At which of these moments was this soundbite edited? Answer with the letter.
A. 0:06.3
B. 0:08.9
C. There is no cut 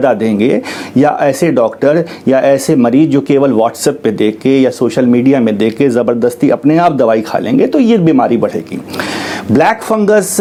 C